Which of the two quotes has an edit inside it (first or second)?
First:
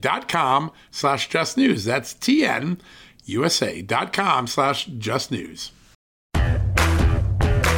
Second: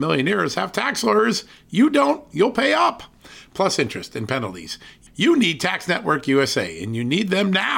first